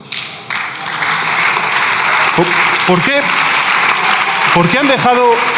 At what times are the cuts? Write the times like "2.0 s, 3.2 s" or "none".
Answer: none